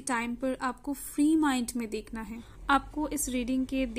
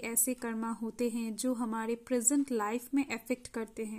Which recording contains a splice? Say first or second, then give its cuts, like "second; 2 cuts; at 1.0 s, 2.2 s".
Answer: first; 1 cut; at 2.5 s